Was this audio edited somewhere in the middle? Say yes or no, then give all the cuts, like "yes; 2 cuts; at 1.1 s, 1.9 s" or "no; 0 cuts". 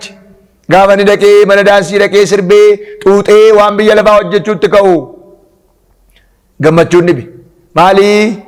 no; 0 cuts